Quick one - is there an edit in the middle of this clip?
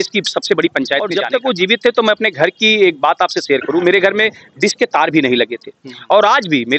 yes; 1 cut; at 1.1 s

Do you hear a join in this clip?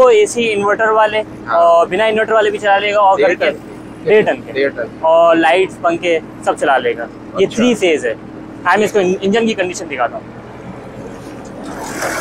no; 0 cuts

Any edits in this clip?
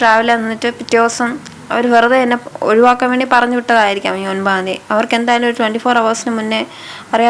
no; 0 cuts

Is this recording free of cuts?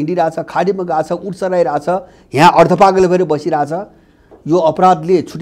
yes; 0 cuts

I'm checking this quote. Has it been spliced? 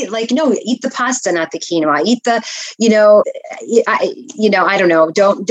no; 0 cuts

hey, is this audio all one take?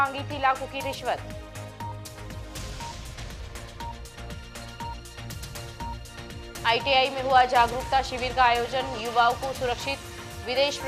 yes; 0 cuts

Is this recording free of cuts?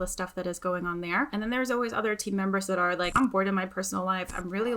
no; 2 cuts; at 1.3 s, 3.1 s

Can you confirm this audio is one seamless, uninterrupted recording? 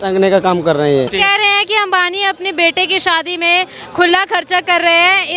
no; 1 cut; at 1.1 s

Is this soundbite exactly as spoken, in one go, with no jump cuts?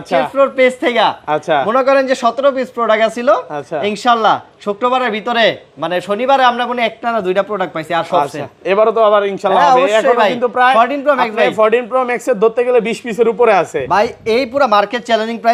yes; 0 cuts

